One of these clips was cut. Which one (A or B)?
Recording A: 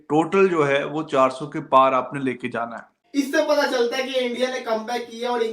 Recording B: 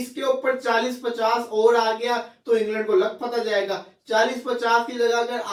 A